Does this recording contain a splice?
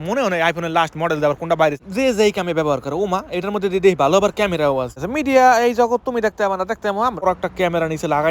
yes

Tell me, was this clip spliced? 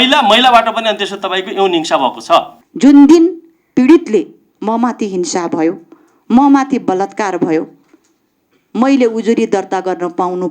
yes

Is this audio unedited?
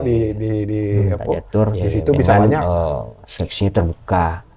no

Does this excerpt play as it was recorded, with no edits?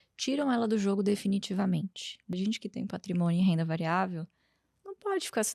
no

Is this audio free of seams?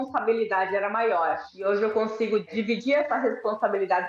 no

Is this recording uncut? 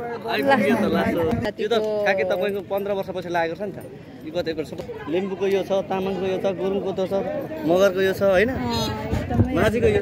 no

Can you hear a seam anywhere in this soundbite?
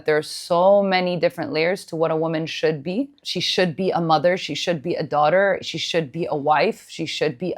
yes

